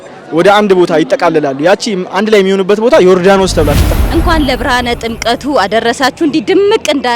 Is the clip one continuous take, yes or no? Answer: no